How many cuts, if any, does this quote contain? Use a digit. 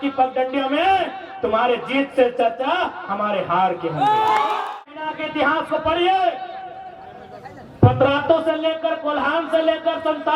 1